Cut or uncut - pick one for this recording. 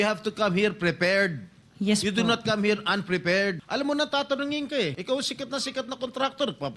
cut